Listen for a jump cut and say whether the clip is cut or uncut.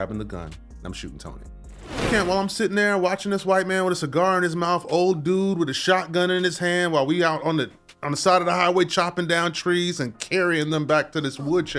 cut